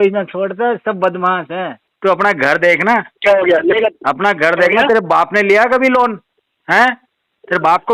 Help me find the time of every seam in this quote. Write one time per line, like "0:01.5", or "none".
0:01.9